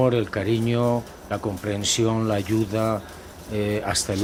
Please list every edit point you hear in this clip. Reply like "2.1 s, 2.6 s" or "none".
none